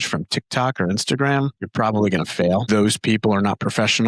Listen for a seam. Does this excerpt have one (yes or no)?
yes